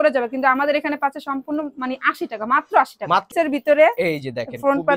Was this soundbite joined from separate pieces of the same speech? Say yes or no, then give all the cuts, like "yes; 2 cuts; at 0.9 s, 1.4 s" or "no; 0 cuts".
yes; 1 cut; at 3.3 s